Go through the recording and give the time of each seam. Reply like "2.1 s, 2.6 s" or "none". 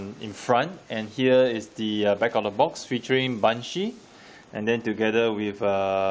4.7 s